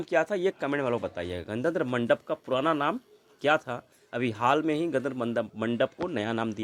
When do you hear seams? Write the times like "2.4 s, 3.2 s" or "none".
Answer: none